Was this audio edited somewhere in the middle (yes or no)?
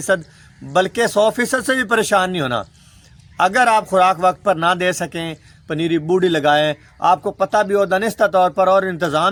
no